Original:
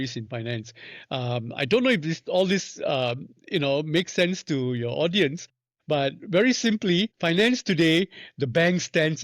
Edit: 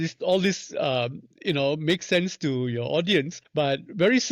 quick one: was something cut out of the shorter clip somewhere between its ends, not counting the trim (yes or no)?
yes